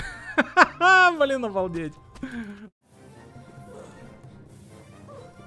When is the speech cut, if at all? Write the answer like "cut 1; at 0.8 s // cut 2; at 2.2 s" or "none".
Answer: cut 1; at 2.6 s